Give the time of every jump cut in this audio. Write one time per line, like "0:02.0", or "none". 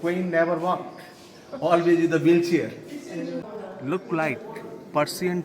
0:03.5